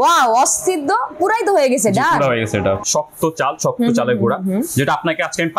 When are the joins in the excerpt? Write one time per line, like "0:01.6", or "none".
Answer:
0:02.8